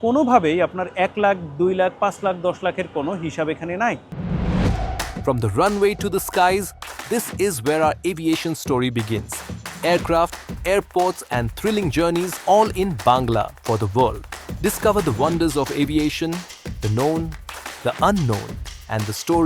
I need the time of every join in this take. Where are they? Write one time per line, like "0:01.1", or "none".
0:04.1